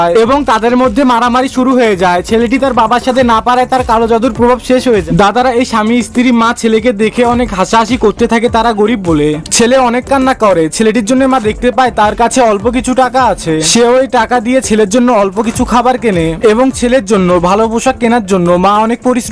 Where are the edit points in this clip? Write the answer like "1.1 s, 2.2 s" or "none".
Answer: 5.0 s

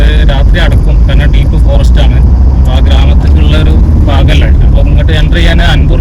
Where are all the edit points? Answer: none

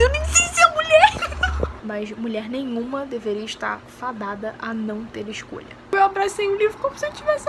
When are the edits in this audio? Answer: 1.8 s, 5.9 s

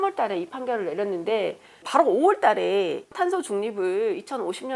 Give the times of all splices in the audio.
1.8 s, 3.1 s

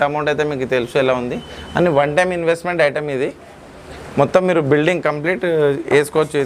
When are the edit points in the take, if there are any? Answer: none

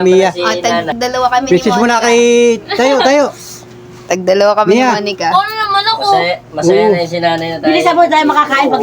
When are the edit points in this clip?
0.9 s

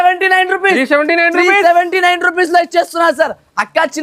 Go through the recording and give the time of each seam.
none

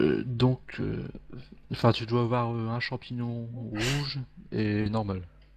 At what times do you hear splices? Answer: none

